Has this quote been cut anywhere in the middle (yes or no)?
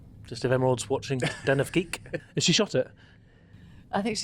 yes